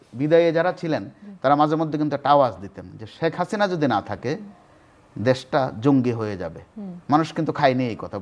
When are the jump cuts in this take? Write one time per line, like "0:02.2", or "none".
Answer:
0:01.1